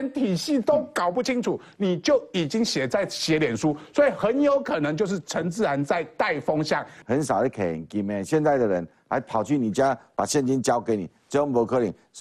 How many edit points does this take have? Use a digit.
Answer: 1